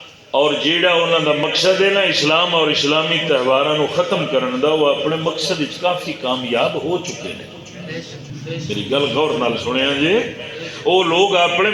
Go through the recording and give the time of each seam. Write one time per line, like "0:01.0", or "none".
0:08.2